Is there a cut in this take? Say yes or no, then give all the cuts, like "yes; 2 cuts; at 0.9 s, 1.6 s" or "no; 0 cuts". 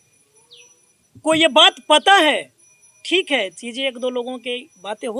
no; 0 cuts